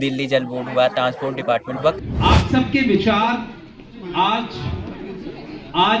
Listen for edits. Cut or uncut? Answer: cut